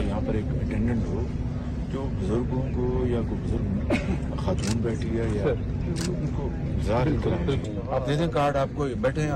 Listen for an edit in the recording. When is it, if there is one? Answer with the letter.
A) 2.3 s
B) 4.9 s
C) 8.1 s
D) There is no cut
D